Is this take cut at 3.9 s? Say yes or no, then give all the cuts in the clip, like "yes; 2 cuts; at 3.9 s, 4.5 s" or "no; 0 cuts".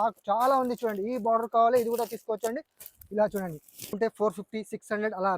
yes; 1 cut; at 3.9 s